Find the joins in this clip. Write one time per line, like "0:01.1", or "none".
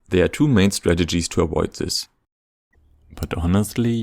0:02.4